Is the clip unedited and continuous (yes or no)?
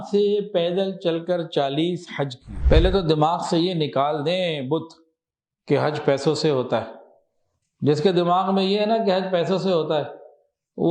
no